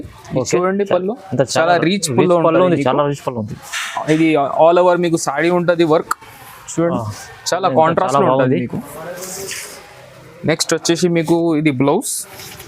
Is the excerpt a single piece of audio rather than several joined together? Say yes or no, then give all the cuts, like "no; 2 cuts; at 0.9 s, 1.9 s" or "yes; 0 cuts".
yes; 0 cuts